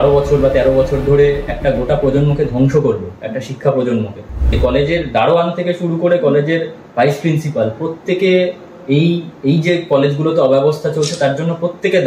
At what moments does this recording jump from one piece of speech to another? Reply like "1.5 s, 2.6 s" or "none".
4.5 s